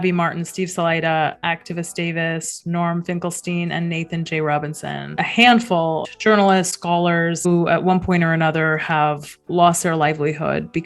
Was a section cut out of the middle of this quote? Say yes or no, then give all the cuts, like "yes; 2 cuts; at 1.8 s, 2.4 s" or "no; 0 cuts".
yes; 3 cuts; at 5.1 s, 6.1 s, 7.5 s